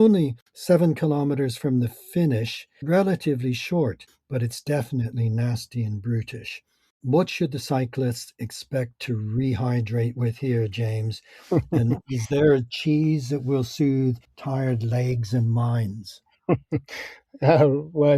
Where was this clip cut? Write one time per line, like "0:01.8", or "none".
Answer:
0:02.7
0:04.1
0:07.0